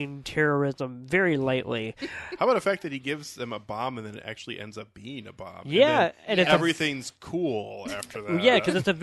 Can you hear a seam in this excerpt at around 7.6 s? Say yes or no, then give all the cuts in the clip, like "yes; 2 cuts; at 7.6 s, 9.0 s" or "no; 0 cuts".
no; 0 cuts